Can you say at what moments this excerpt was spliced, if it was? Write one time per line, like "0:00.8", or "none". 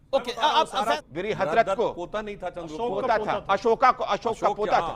0:01.0